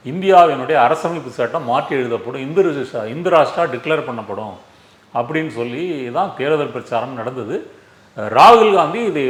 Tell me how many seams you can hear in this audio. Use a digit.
0